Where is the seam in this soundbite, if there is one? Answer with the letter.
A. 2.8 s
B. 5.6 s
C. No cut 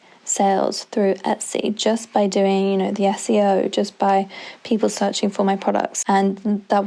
C